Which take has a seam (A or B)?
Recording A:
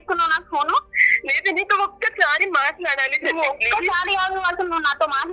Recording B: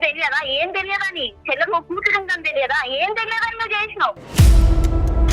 B